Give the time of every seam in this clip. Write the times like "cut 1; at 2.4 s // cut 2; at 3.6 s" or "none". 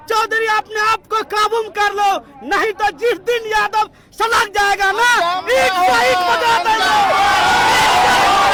none